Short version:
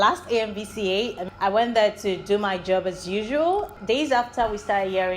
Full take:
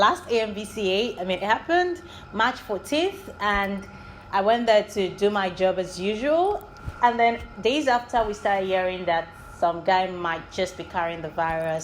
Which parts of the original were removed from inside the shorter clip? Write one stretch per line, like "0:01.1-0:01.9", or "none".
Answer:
0:01.2-0:04.1
0:06.7-0:07.5